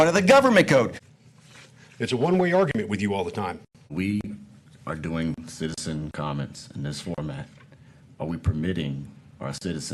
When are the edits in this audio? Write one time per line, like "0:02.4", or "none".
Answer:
0:01.0
0:03.9